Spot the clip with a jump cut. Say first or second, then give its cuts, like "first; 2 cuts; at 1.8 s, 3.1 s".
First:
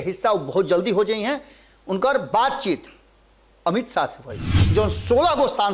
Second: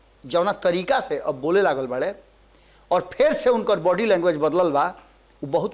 first; 1 cut; at 4.6 s